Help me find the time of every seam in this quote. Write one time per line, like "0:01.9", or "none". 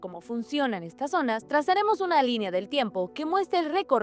none